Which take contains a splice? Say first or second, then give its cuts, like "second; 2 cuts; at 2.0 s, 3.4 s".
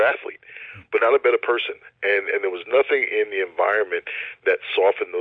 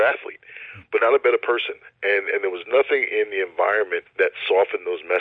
second; 1 cut; at 4.0 s